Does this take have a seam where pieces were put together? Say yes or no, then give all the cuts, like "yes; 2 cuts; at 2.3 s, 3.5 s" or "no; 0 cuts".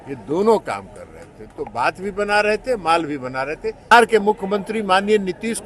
yes; 1 cut; at 3.9 s